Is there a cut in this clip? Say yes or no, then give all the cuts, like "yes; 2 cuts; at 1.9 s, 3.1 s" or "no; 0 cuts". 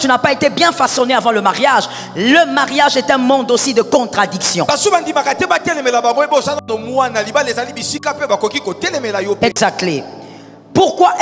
no; 0 cuts